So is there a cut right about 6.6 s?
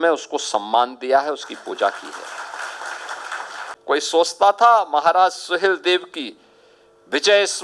no; 1 cut; at 3.7 s

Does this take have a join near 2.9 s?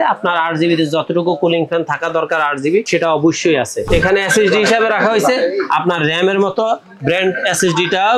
yes; 2 cuts; at 2.9 s, 3.8 s

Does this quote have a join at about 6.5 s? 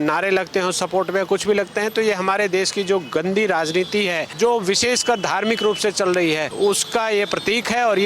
yes; 2 cuts; at 4.3 s, 6.5 s

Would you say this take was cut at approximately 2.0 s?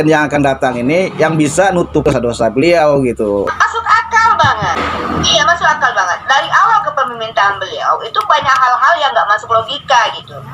yes; 3 cuts; at 2.0 s, 3.5 s, 4.8 s

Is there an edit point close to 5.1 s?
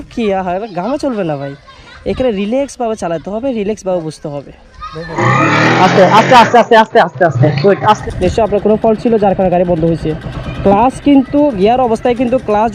yes; 2 cuts; at 5.1 s, 8.0 s

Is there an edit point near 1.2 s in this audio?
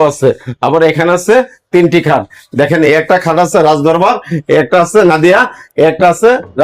no; 0 cuts

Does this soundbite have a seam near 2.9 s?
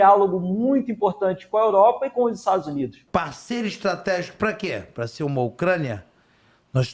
yes; 1 cut; at 2.9 s

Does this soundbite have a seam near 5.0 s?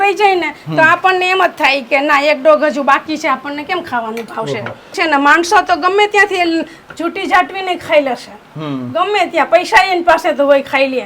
yes; 1 cut; at 5.0 s

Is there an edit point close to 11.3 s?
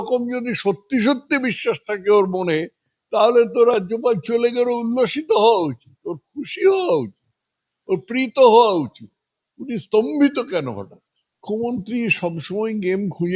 yes; 1 cut; at 11.3 s

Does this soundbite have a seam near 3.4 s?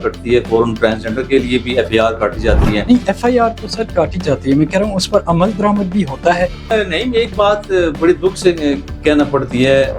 no; 1 cut; at 6.7 s

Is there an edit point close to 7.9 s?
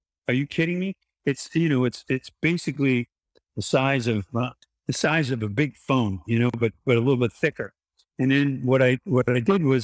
no; 0 cuts

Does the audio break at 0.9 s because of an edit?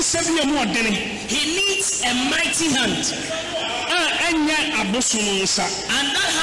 no; 0 cuts

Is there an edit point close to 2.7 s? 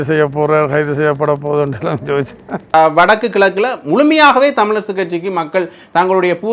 yes; 1 cut; at 2.7 s

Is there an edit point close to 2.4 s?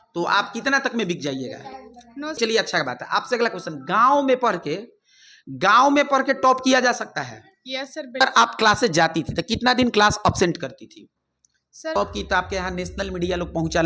yes; 3 cuts; at 2.4 s, 8.2 s, 12.0 s

